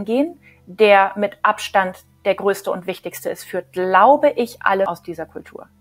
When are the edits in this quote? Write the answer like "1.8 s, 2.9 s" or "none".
4.9 s